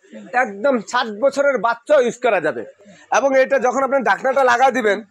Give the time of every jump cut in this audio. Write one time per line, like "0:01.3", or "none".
none